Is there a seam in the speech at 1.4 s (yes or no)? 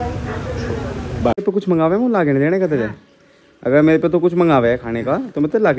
yes